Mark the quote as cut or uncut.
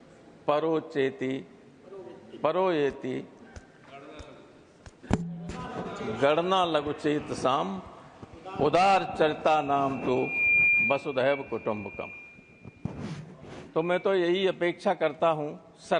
uncut